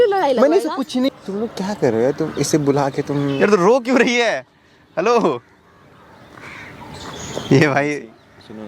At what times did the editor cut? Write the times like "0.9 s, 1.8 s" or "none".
1.1 s